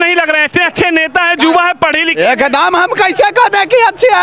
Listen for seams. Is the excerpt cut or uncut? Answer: uncut